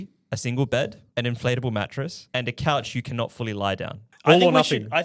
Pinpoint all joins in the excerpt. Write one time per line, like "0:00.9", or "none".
0:01.0
0:02.2
0:04.0